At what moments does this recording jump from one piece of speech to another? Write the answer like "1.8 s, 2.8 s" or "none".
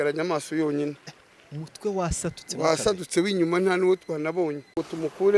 none